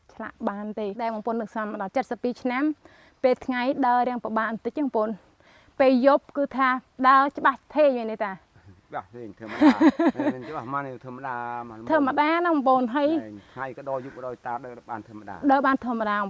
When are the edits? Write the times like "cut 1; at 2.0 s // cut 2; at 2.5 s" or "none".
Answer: cut 1; at 0.9 s